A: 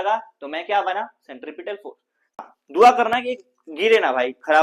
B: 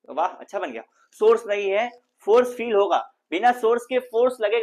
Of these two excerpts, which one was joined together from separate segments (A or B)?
A